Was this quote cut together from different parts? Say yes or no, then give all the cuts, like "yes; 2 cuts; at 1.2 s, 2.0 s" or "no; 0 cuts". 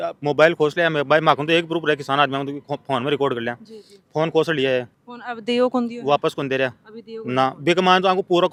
no; 0 cuts